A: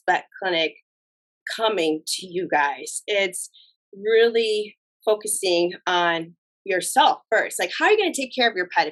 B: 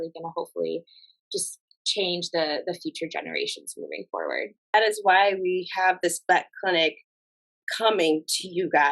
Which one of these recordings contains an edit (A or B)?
B